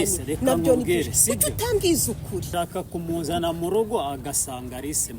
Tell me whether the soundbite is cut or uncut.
cut